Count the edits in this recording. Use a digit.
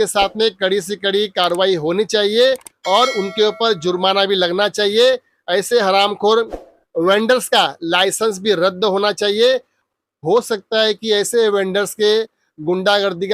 1